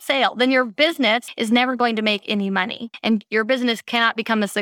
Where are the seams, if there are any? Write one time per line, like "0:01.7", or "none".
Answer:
0:01.3
0:02.8